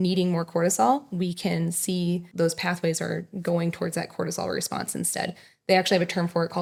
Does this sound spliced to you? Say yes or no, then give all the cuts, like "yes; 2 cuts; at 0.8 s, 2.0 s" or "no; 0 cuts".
no; 0 cuts